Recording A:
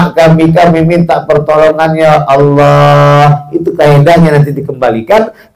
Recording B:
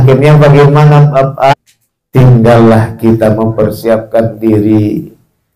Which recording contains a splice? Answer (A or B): B